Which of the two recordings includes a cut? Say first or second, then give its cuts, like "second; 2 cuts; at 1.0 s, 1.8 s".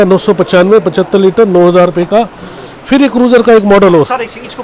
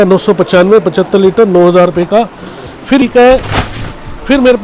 second; 1 cut; at 3.0 s